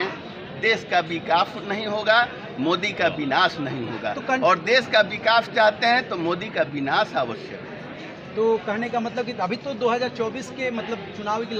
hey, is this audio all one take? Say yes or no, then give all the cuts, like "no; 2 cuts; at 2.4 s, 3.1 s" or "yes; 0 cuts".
yes; 0 cuts